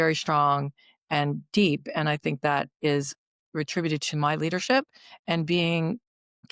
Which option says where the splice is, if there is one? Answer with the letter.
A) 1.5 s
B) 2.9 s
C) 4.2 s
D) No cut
D